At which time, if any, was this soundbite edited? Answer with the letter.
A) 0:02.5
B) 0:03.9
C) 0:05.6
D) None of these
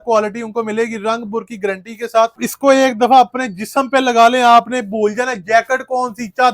A